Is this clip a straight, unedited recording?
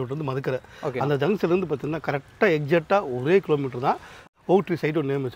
no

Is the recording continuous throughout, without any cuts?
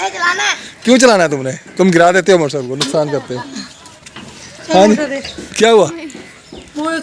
yes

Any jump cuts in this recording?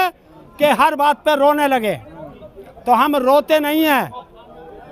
no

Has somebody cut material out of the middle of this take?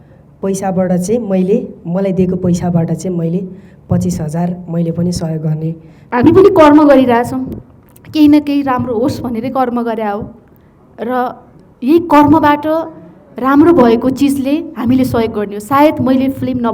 yes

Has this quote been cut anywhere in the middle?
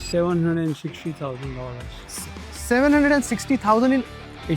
no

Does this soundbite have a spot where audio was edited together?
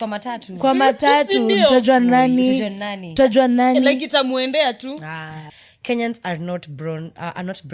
yes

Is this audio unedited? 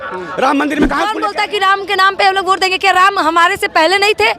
no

